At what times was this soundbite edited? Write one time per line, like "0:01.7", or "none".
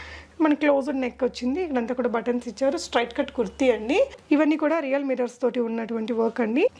0:04.2